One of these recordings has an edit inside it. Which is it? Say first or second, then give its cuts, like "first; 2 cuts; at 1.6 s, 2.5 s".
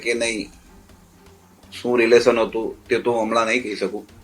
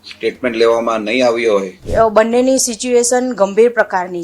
second; 1 cut; at 1.8 s